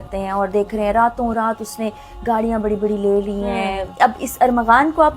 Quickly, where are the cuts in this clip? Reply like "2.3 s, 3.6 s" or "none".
3.9 s

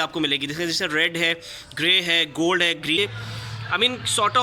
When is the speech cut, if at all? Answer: 3.0 s

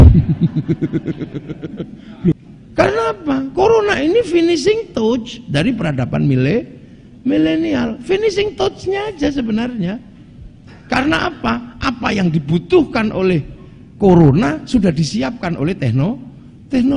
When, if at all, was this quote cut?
2.5 s

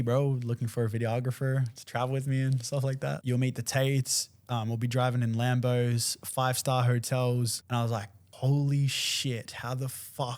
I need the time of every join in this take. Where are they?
3.2 s, 8.0 s

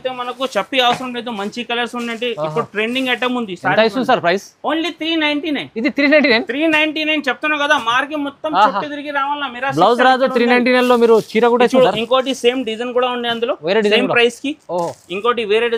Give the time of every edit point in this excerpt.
none

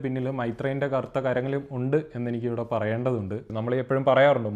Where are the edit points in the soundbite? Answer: 3.5 s

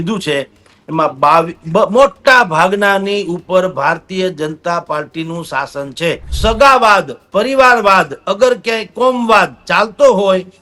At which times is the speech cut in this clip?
6.3 s

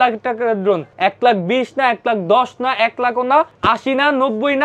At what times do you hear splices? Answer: 0.9 s, 3.5 s

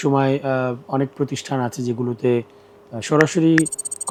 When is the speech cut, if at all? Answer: none

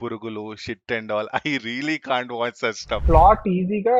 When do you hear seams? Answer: 2.9 s

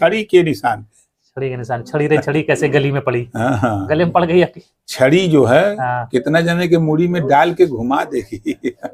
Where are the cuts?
none

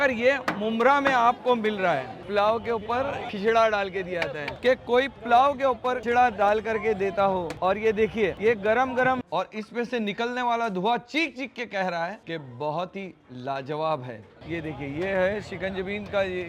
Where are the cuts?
2.2 s, 3.3 s, 4.6 s, 9.2 s, 14.3 s

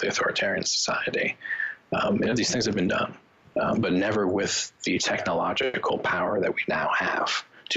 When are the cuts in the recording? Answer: none

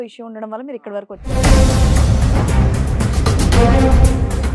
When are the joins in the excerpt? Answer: 1.3 s

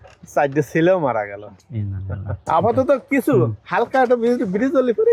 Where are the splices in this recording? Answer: none

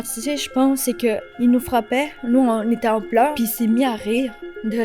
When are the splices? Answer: 1.3 s, 3.3 s

